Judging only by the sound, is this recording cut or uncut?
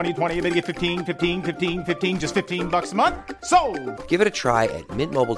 uncut